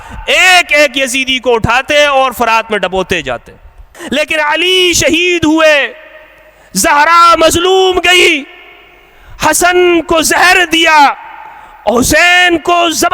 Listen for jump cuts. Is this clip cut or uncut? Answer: cut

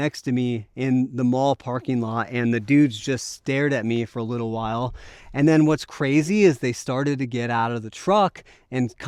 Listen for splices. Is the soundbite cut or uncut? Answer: uncut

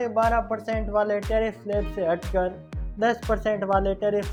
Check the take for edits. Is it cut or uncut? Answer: uncut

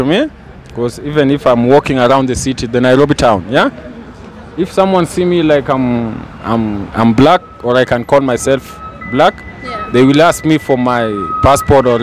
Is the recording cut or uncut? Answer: uncut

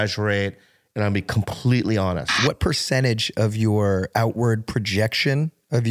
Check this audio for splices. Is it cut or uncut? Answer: cut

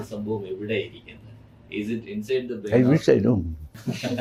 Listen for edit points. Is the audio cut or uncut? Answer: uncut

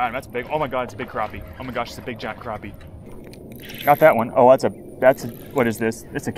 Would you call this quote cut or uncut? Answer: cut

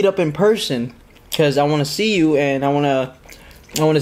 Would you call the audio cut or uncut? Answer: uncut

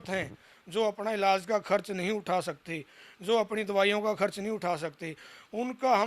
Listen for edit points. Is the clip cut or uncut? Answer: uncut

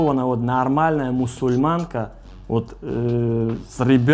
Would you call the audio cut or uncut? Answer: uncut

